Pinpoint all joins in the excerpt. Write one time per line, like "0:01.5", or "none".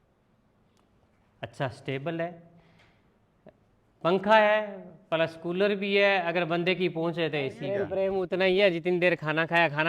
0:07.9